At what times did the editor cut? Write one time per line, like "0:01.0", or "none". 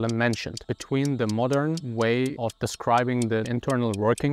0:01.8
0:03.5